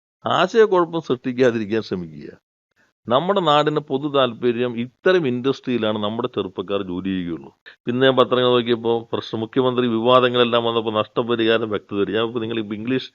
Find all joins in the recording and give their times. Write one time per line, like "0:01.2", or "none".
0:07.7